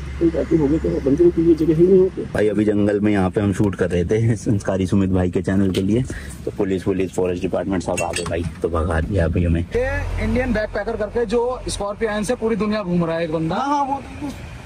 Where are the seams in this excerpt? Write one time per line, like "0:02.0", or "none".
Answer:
0:02.3
0:09.7